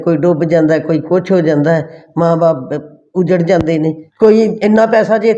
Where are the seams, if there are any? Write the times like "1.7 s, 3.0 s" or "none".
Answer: 4.0 s